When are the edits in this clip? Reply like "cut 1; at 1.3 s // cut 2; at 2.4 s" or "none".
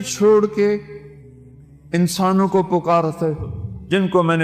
none